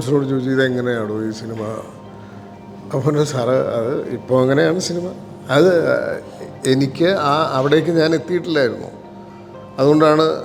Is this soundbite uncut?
yes; 0 cuts

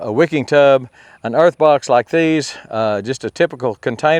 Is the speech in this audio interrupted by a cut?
no; 0 cuts

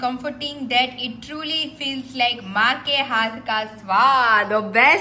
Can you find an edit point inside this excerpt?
no; 0 cuts

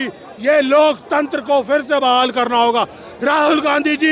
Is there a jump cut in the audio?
no; 0 cuts

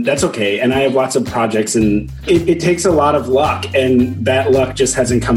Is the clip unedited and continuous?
no; 1 cut; at 2.2 s

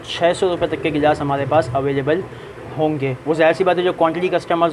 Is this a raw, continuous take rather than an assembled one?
yes; 0 cuts

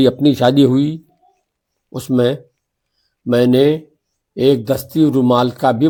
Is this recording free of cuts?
yes; 0 cuts

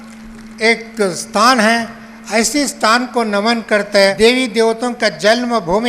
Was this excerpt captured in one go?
no; 1 cut; at 4.2 s

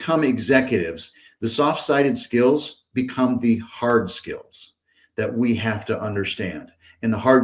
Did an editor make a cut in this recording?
no; 0 cuts

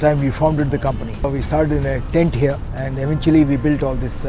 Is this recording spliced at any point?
yes; 2 cuts; at 1.3 s, 2.7 s

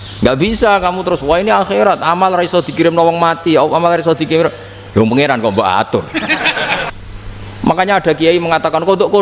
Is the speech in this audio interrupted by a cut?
yes; 1 cut; at 6.9 s

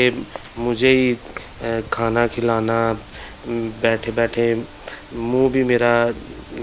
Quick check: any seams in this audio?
no; 0 cuts

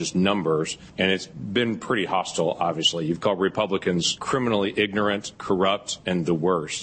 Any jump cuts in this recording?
yes; 3 cuts; at 1.1 s, 4.2 s, 5.7 s

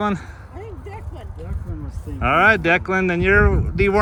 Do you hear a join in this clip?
no; 0 cuts

